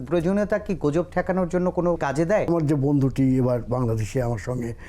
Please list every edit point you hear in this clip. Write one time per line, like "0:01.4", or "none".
0:02.4